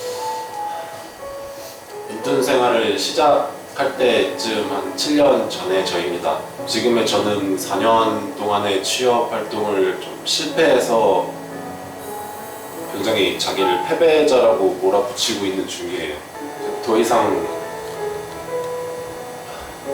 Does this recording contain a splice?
yes; 2 cuts; at 6.6 s, 16.4 s

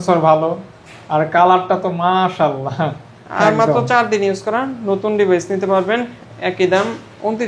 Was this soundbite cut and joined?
no; 0 cuts

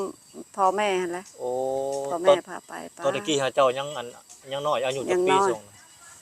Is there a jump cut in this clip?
no; 0 cuts

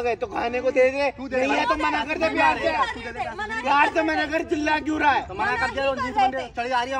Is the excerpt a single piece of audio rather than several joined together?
yes; 0 cuts

